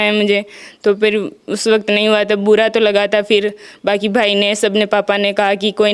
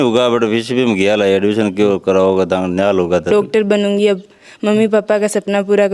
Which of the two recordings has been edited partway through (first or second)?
second